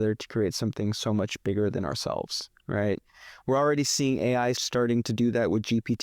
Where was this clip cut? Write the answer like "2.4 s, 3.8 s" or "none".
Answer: 4.6 s